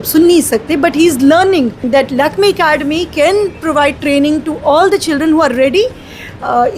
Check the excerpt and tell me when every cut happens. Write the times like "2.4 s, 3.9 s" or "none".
1.8 s